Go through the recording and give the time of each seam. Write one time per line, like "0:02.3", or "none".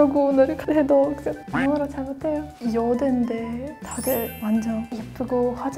0:02.5